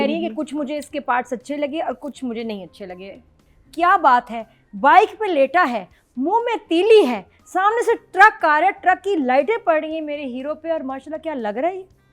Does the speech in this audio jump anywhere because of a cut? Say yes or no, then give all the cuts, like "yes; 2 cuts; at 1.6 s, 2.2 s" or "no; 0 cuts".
yes; 1 cut; at 3.4 s